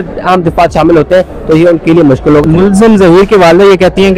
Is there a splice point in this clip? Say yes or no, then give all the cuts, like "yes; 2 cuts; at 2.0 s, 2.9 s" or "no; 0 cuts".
yes; 1 cut; at 2.4 s